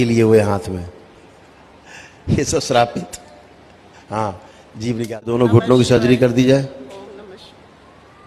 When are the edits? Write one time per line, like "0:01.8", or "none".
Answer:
0:05.3